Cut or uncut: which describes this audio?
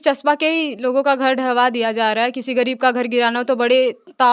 uncut